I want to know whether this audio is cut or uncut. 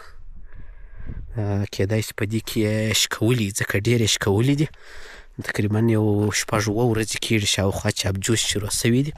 uncut